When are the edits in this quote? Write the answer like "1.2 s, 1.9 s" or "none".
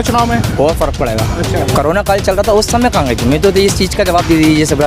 1.7 s